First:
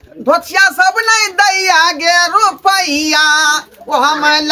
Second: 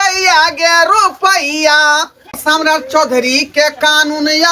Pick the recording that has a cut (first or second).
second